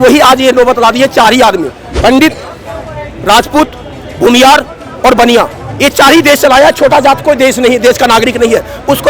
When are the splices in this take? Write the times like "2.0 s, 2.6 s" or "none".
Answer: 1.8 s